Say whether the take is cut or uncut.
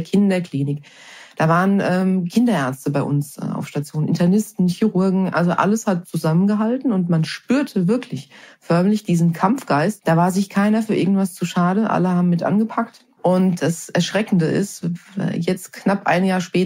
cut